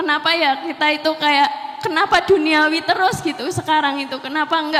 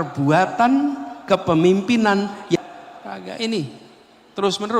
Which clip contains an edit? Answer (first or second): second